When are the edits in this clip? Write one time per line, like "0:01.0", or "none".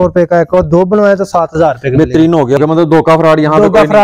0:02.6